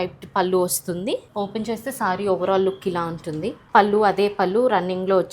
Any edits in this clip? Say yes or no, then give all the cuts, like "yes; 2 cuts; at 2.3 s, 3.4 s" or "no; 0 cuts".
yes; 2 cuts; at 1.3 s, 3.6 s